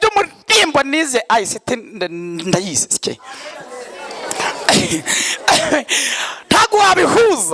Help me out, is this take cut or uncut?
uncut